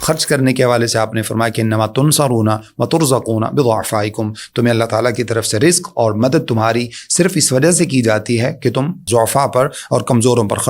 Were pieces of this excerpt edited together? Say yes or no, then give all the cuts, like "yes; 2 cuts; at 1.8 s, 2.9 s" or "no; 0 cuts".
yes; 1 cut; at 9.0 s